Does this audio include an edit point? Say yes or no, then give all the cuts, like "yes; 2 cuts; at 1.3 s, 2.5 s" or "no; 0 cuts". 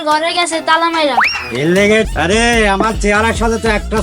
yes; 1 cut; at 2.1 s